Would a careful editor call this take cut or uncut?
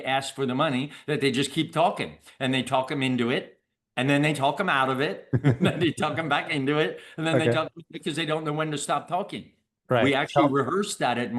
uncut